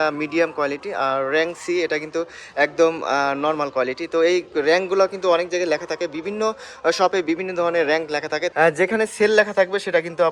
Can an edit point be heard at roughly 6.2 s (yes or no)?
no